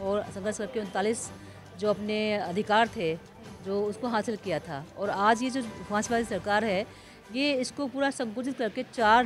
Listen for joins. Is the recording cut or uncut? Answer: uncut